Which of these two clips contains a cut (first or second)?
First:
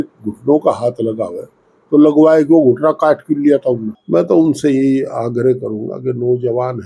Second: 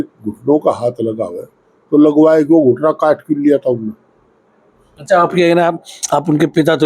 first